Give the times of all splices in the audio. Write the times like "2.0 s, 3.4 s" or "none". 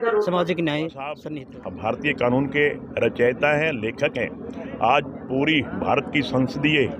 1.2 s